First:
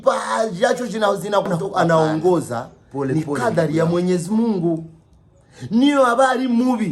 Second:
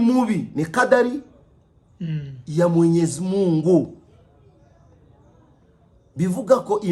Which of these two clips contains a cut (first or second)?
first